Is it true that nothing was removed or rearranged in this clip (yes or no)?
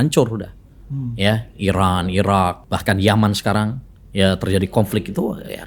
no